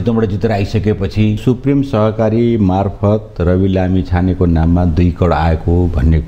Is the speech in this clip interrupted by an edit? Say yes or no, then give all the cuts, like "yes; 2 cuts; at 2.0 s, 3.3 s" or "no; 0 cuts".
yes; 1 cut; at 1.4 s